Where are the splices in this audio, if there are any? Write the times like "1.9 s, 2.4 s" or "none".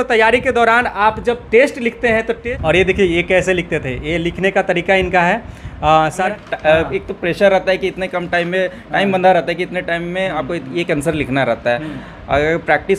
2.3 s, 6.3 s